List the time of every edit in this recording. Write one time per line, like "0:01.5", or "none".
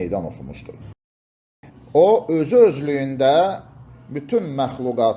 0:01.3